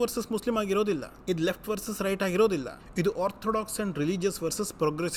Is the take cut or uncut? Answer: uncut